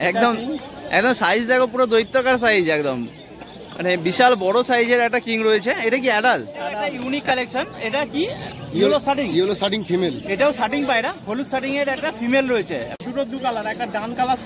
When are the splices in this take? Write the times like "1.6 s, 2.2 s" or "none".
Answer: 6.9 s, 13.0 s